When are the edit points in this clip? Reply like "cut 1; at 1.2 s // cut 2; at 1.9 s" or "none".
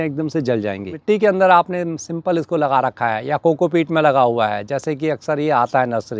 cut 1; at 1.0 s